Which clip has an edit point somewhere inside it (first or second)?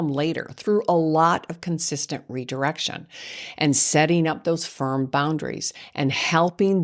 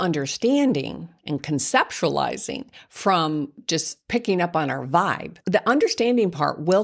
second